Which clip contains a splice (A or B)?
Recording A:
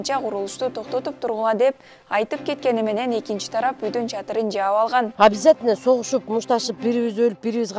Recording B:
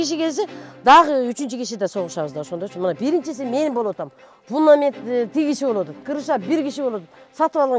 A